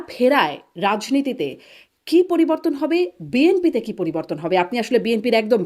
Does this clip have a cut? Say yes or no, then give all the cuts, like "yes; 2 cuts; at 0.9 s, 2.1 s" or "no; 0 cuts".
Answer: no; 0 cuts